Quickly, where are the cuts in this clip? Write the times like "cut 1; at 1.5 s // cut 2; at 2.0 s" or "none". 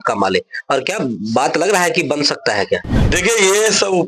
cut 1; at 2.9 s